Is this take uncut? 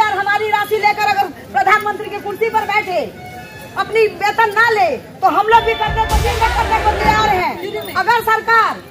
no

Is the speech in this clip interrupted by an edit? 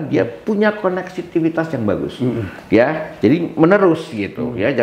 no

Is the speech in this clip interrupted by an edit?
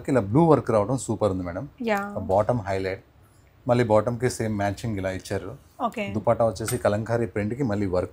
no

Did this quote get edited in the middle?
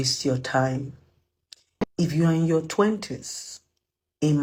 no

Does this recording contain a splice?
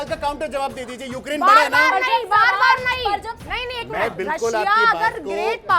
yes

